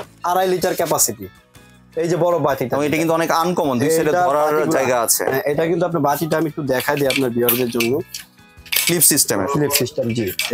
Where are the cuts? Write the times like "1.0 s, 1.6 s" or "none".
none